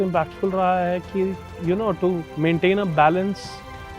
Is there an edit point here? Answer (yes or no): yes